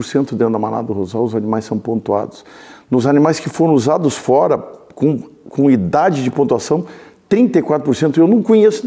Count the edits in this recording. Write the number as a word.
zero